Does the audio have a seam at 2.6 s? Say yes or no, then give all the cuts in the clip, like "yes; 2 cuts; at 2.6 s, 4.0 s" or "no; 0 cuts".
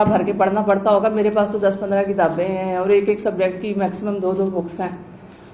no; 0 cuts